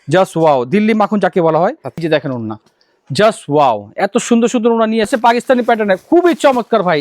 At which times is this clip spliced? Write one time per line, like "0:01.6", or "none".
0:02.0
0:05.1